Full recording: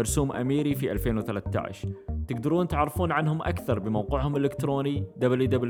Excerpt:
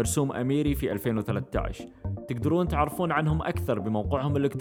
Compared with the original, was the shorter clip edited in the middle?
no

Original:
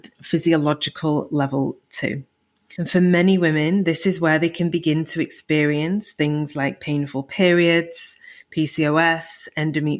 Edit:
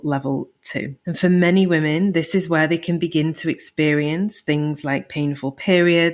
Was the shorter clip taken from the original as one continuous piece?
no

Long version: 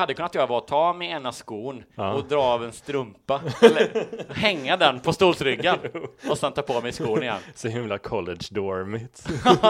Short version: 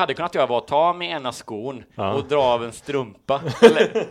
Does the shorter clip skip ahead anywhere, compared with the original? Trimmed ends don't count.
no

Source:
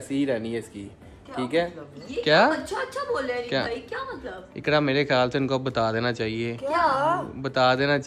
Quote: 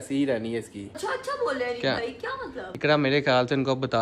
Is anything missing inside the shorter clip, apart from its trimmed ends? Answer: yes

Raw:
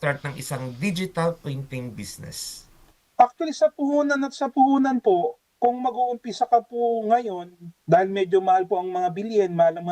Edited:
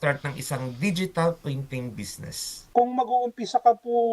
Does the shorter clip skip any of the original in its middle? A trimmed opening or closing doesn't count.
yes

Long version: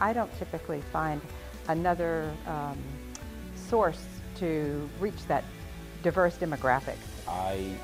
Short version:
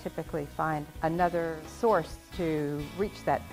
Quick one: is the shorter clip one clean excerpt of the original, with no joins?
no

